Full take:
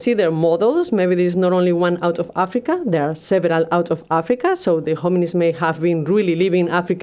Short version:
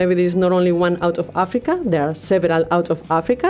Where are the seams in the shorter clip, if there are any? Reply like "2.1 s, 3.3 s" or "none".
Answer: none